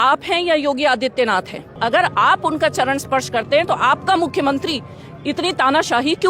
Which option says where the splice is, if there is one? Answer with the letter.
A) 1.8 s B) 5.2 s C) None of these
A